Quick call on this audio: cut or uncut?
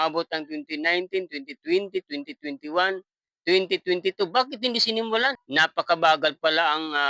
cut